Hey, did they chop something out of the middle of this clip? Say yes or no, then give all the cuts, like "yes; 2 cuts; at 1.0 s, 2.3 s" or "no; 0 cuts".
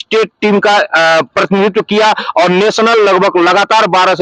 no; 0 cuts